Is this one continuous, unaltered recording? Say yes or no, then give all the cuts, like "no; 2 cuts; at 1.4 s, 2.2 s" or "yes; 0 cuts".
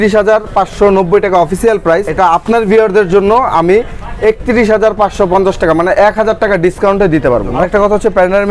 yes; 0 cuts